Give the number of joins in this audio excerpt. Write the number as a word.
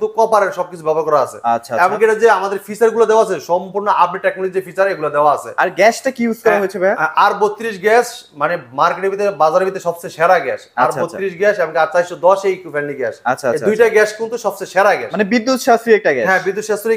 zero